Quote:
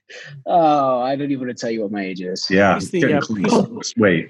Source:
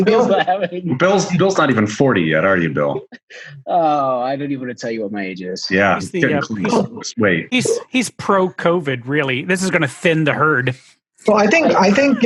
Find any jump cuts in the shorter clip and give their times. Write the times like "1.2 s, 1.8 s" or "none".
none